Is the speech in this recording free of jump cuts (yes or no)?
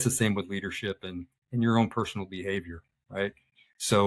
yes